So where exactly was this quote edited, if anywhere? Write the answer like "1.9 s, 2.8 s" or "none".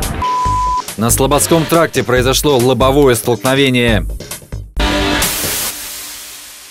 4.6 s